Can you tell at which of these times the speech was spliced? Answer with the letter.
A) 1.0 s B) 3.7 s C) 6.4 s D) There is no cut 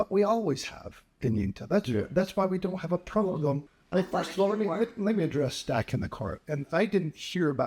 B